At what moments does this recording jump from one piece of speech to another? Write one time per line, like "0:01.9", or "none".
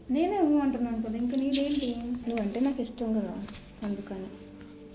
0:02.2